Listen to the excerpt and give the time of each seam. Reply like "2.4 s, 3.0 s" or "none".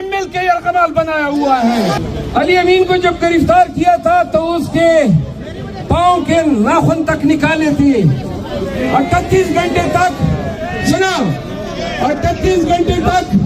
2.0 s